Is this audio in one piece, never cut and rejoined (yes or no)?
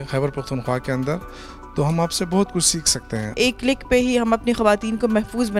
no